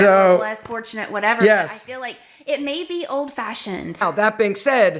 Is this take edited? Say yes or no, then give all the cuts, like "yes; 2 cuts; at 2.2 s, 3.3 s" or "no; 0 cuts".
yes; 1 cut; at 4.0 s